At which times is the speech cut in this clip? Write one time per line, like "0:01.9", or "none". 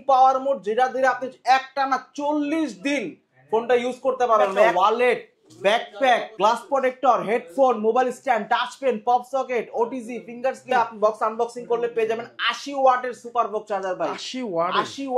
0:04.7
0:10.6